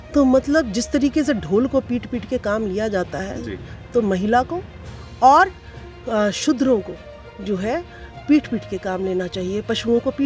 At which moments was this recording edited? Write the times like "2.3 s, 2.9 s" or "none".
none